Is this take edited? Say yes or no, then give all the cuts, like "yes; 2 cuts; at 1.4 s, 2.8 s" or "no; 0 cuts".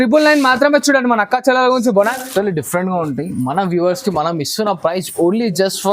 yes; 1 cut; at 2.1 s